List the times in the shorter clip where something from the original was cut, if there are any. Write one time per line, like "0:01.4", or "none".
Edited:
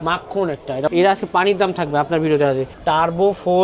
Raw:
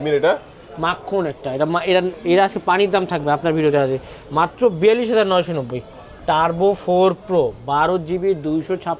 0:00.9
0:02.7